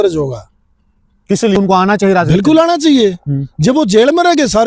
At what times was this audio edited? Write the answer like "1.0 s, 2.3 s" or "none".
1.6 s